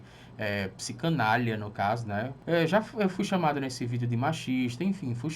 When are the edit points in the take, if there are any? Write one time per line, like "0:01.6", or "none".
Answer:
0:02.3